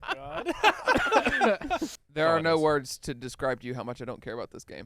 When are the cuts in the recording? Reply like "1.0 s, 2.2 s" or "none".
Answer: 2.0 s